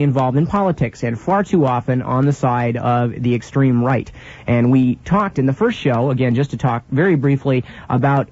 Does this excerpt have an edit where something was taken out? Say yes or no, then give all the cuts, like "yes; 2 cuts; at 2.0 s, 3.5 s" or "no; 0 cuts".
yes; 1 cut; at 2.9 s